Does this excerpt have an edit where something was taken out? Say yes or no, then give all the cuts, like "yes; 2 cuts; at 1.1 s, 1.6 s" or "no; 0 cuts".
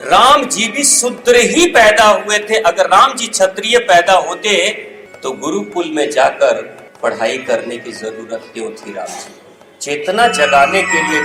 no; 0 cuts